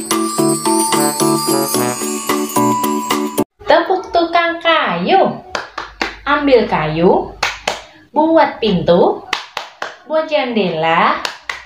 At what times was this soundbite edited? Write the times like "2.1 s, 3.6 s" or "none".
3.2 s

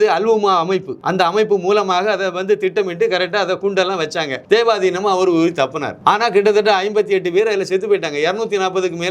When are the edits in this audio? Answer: 1.0 s, 4.3 s, 5.9 s

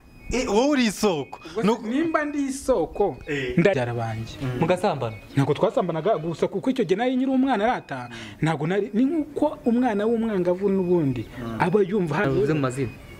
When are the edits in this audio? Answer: 3.8 s, 12.2 s

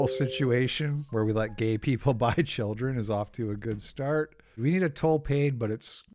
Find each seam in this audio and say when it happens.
4.6 s

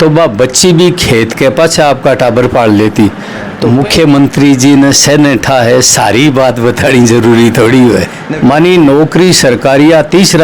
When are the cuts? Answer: 3.6 s, 8.2 s

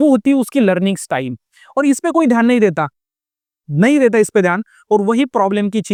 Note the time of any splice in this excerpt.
none

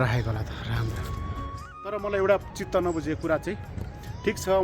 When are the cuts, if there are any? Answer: 2.0 s

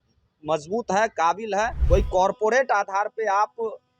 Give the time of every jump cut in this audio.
1.8 s

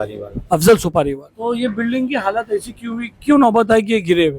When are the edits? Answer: 1.3 s

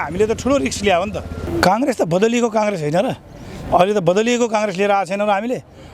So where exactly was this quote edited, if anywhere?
1.4 s

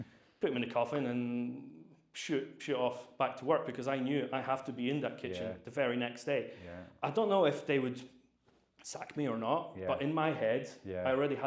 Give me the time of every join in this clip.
none

